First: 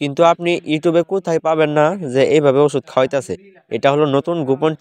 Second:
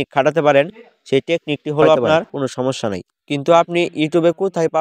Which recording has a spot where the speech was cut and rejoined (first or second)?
second